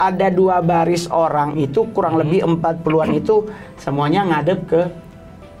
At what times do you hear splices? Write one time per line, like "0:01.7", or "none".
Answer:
none